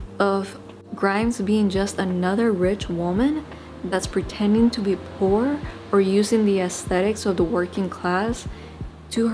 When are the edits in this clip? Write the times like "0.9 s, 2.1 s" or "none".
none